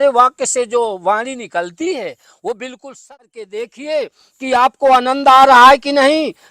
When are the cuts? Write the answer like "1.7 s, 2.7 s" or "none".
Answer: 3.1 s